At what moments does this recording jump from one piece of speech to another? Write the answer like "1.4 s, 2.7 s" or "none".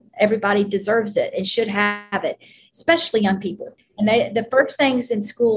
3.8 s